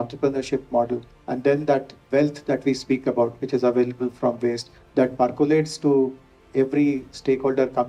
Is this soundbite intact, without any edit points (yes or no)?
yes